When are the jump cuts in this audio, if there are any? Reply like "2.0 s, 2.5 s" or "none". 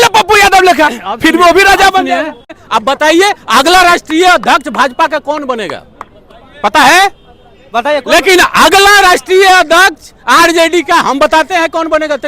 2.6 s